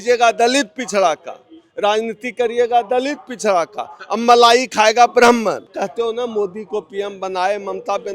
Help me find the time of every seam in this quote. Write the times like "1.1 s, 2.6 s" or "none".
5.8 s

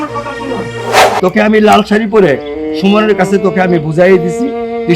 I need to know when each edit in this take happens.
1.2 s

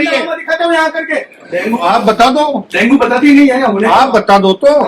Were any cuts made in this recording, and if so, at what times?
1.4 s

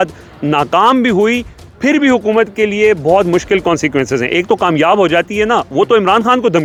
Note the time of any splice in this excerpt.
none

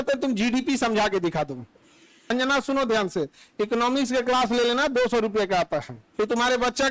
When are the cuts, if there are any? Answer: 2.3 s, 6.0 s

